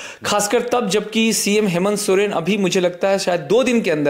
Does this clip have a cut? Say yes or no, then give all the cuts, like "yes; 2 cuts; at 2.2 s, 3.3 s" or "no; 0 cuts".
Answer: no; 0 cuts